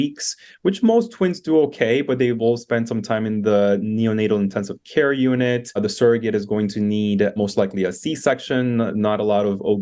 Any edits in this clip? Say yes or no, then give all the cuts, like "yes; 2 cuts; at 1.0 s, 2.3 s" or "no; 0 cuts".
yes; 2 cuts; at 5.8 s, 7.3 s